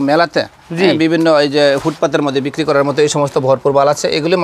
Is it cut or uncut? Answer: uncut